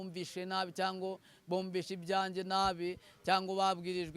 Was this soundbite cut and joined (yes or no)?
no